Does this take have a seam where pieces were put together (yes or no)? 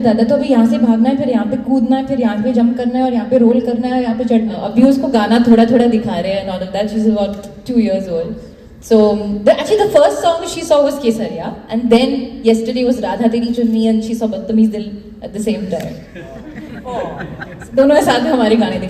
yes